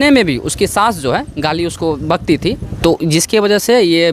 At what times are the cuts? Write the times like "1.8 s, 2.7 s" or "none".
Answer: 2.7 s